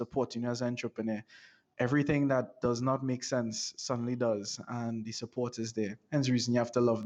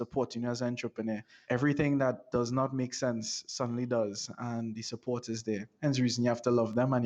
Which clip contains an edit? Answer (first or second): second